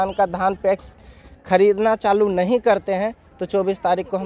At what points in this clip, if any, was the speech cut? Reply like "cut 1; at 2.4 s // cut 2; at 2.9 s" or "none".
none